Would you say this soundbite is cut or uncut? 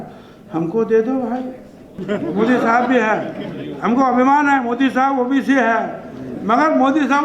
cut